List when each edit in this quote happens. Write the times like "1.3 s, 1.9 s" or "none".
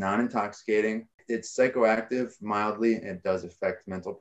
1.2 s